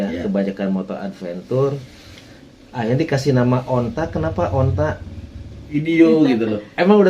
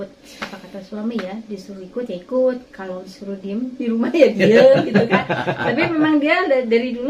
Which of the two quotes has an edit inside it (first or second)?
first